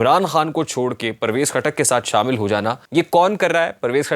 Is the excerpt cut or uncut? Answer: cut